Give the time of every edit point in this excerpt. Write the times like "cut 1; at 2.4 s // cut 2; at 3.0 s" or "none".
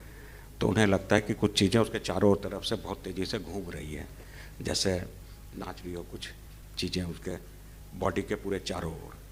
none